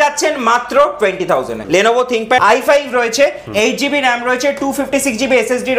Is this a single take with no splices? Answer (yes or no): no